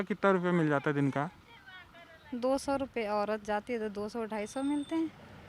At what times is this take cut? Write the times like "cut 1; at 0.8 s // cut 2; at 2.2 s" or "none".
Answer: none